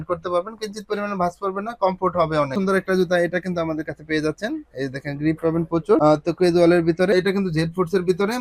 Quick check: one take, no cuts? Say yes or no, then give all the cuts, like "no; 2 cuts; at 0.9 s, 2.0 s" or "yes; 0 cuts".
no; 2 cuts; at 2.6 s, 7.1 s